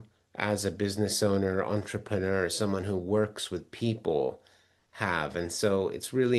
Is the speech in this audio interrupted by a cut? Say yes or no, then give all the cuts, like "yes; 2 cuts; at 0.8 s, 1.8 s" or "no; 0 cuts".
no; 0 cuts